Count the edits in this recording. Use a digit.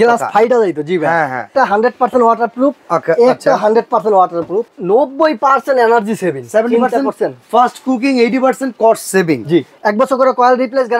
3